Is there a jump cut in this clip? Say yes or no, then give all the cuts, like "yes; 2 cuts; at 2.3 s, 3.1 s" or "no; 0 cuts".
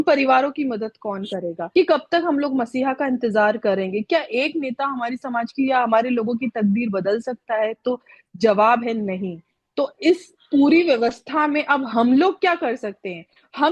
yes; 1 cut; at 1.6 s